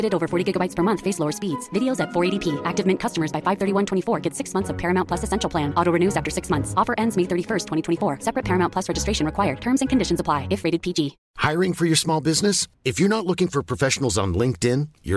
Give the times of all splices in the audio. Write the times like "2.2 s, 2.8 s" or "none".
none